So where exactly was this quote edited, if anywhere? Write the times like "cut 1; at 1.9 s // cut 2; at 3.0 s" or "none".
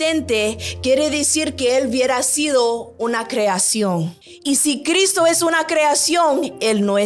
cut 1; at 4.2 s